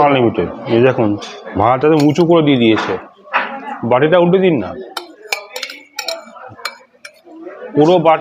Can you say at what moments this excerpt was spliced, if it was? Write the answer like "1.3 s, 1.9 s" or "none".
none